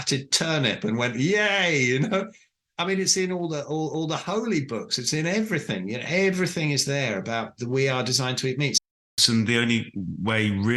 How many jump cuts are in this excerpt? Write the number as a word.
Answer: one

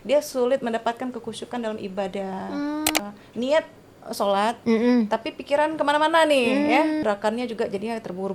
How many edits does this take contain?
two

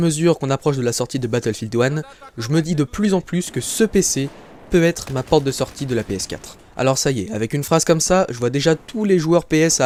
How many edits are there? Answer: zero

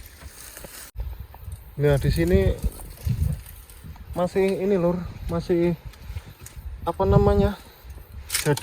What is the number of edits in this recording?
one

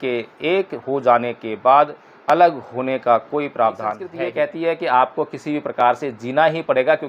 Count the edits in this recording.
one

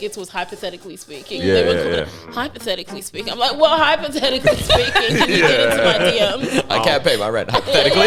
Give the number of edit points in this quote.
zero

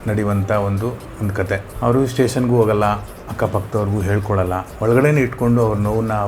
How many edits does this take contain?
two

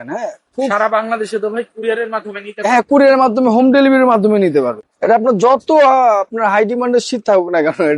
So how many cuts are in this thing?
one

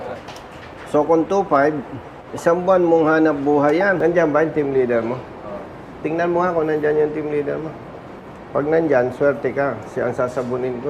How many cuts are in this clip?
one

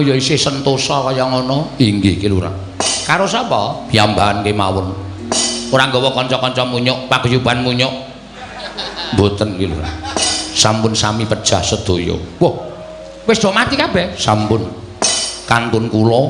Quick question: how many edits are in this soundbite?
zero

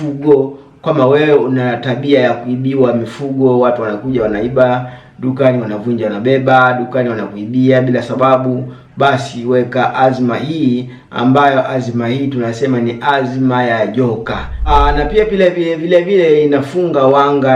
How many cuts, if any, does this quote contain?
one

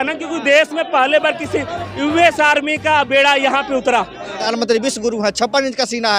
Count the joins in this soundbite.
one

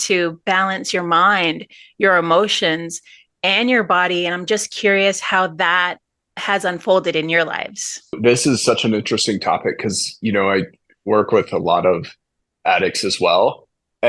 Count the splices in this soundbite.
one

